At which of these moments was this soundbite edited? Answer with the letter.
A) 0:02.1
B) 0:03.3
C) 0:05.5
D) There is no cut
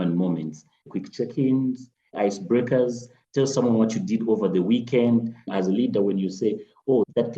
C